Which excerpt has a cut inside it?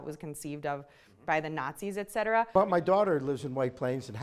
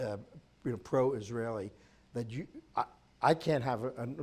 first; 1 cut; at 2.5 s

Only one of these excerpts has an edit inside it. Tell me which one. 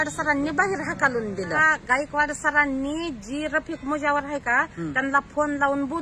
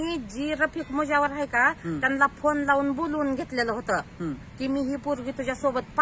first; 1 cut; at 1.6 s

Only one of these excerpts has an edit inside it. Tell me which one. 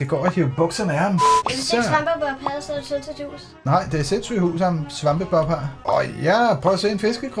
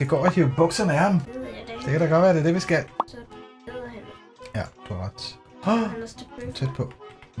first; 2 cuts; at 1.3 s, 5.7 s

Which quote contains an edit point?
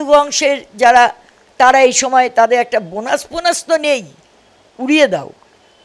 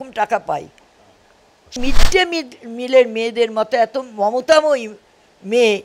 second; 1 cut; at 1.8 s

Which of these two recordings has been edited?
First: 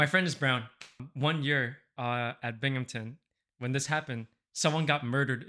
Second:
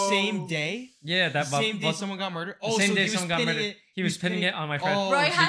first; 1 cut; at 1.0 s

